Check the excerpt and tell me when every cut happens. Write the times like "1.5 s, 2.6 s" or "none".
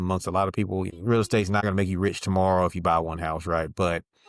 0.9 s, 1.6 s

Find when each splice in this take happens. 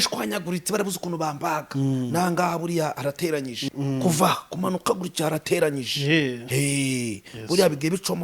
3.6 s

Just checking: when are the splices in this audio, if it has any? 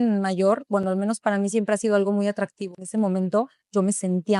2.8 s

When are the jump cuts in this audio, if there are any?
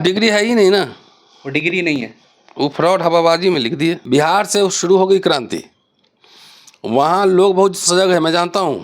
4.0 s

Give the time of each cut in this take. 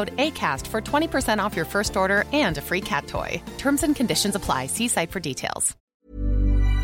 5.8 s

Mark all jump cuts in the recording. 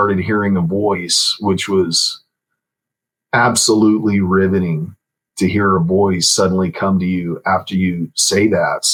none

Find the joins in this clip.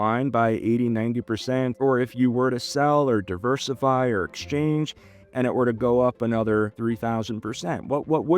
1.7 s, 6.7 s

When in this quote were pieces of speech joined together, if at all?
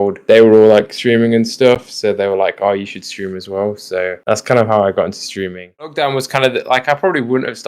5.9 s

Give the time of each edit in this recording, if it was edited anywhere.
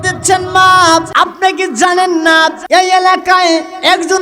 1.1 s, 2.6 s

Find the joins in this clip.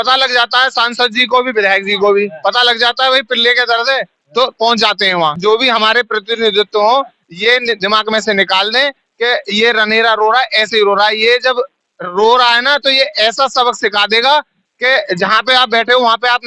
5.4 s

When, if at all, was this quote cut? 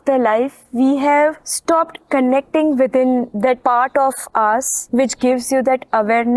1.5 s, 3.4 s, 4.8 s

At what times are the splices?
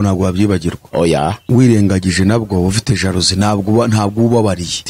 1.4 s

